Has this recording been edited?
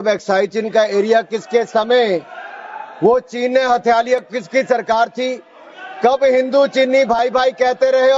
no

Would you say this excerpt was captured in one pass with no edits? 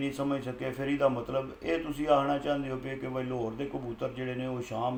yes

